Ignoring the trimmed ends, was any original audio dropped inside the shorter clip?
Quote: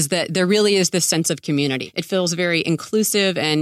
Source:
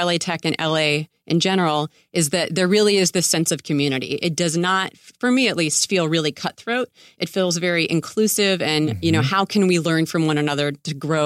yes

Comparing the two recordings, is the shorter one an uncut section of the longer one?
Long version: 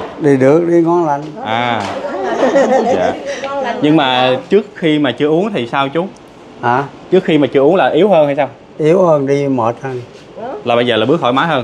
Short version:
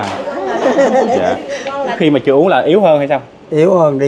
no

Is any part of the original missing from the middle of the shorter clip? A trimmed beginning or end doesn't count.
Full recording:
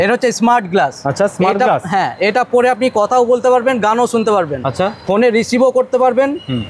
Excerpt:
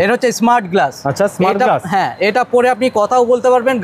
no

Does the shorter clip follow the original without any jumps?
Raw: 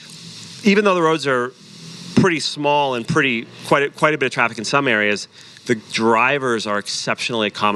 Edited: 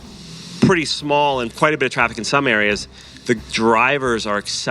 no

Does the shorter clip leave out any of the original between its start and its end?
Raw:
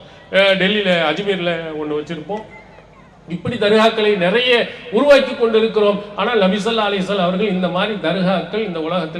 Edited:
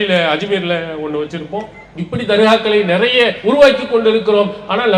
yes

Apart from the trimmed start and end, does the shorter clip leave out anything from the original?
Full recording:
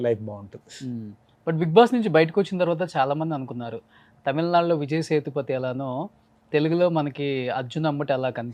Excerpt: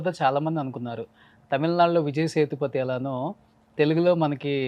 no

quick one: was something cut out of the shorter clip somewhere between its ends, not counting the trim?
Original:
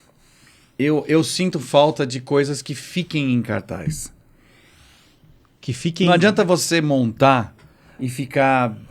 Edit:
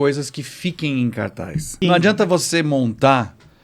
yes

